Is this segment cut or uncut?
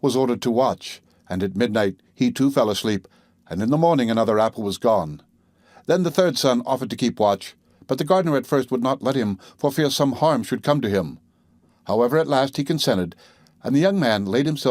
cut